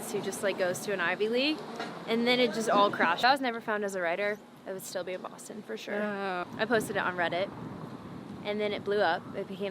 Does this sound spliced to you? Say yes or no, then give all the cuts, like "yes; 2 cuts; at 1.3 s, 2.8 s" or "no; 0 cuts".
yes; 2 cuts; at 3.2 s, 6.4 s